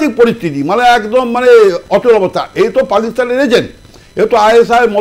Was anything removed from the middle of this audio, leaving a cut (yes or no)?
no